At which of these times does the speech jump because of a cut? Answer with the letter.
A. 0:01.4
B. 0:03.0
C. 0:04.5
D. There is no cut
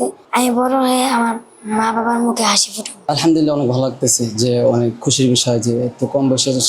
B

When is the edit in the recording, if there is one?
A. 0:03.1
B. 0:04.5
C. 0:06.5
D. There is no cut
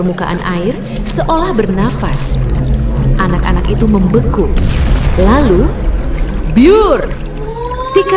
D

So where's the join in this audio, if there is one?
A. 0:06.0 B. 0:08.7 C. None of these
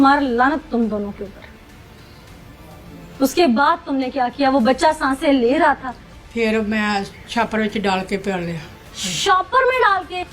A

